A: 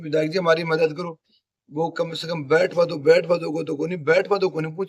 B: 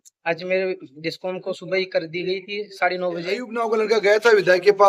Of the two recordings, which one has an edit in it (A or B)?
B